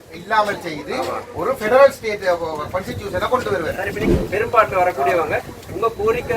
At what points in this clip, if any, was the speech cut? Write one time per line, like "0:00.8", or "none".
0:04.0